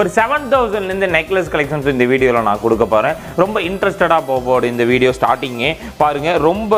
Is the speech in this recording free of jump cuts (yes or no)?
yes